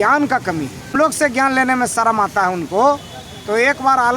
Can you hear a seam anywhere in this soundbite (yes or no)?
yes